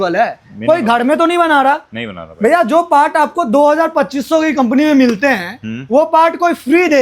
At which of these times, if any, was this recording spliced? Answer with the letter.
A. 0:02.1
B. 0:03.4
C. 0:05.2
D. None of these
D